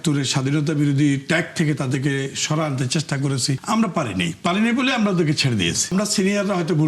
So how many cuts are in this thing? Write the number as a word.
two